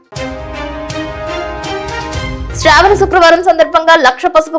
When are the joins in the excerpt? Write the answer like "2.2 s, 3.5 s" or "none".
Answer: none